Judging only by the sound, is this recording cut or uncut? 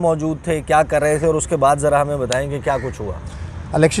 uncut